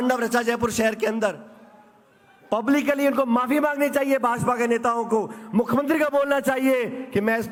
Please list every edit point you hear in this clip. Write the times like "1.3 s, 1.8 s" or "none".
none